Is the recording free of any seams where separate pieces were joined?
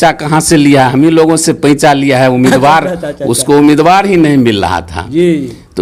yes; 0 cuts

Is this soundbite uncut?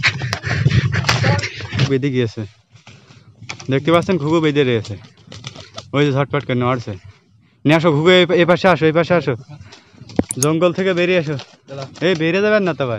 no; 1 cut; at 1.8 s

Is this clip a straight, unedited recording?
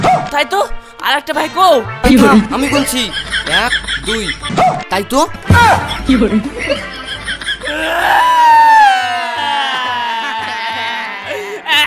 yes; 0 cuts

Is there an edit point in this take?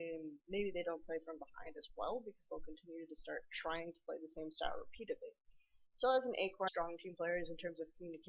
no; 0 cuts

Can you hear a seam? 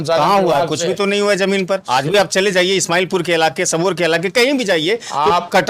yes; 1 cut; at 1.8 s

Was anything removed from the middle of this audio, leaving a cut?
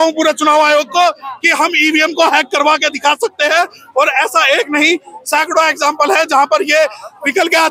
no; 0 cuts

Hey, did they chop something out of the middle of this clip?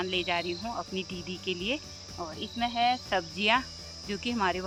no; 0 cuts

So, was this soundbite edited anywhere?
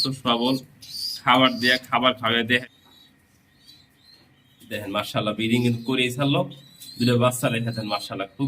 yes; 1 cut; at 2.6 s

